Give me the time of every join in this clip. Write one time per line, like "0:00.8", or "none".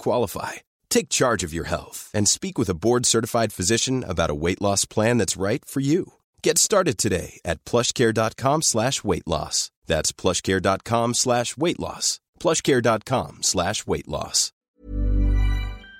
0:14.7